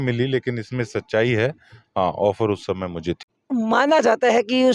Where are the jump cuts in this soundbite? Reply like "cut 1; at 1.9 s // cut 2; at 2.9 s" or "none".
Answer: none